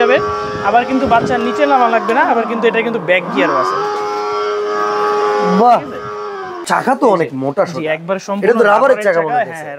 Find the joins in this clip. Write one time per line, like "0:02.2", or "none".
0:06.6